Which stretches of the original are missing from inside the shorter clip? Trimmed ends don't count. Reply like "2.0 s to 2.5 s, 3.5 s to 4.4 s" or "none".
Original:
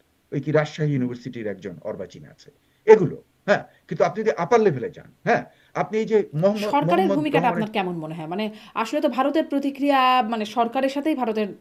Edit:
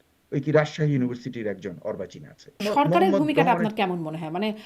2.6 s to 6.6 s